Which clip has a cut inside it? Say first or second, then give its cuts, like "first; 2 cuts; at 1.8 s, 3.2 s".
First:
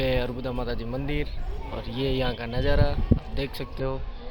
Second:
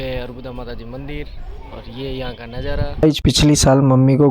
second; 1 cut; at 3.0 s